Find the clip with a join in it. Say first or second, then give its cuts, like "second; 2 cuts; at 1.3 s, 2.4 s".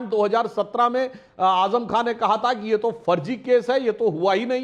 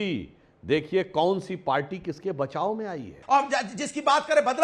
second; 1 cut; at 3.1 s